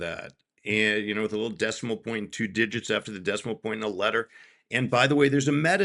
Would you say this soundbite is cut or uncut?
uncut